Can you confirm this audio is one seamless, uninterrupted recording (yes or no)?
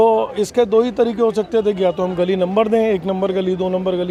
yes